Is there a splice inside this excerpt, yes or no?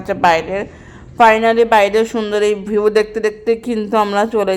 no